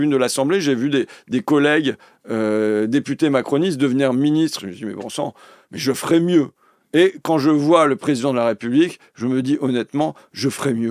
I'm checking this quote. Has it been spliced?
no; 0 cuts

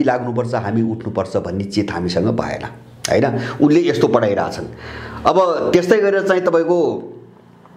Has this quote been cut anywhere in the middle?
no; 0 cuts

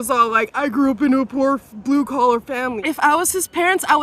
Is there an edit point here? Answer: yes; 1 cut; at 2.8 s

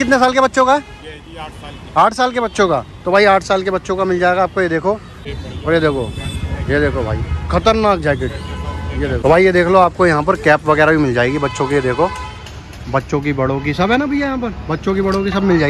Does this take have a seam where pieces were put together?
yes; 2 cuts; at 5.3 s, 9.2 s

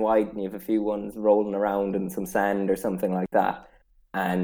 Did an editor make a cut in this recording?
no; 0 cuts

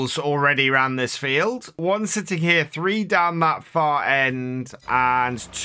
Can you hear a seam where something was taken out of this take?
yes; 1 cut; at 1.8 s

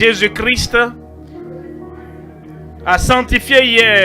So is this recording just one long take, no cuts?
no; 2 cuts; at 0.9 s, 2.5 s

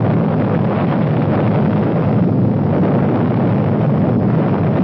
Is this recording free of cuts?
no; 1 cut; at 3.6 s

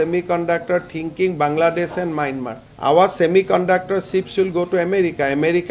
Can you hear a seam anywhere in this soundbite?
no; 0 cuts

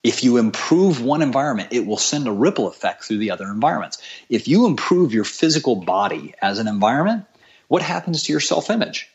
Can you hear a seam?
no; 0 cuts

